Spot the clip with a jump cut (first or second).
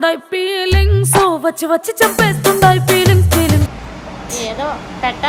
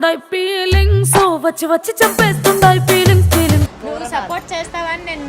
second